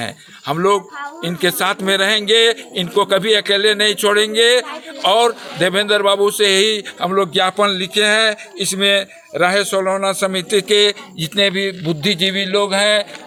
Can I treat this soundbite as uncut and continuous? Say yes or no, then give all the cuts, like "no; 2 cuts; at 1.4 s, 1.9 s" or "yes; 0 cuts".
yes; 0 cuts